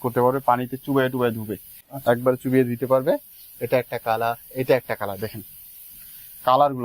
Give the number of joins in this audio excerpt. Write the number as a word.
zero